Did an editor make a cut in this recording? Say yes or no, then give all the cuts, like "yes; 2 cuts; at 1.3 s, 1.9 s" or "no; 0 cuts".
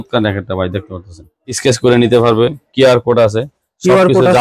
yes; 1 cut; at 1.6 s